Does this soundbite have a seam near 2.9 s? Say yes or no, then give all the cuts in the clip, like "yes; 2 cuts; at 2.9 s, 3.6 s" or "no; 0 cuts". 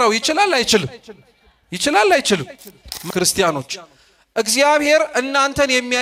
yes; 1 cut; at 2.9 s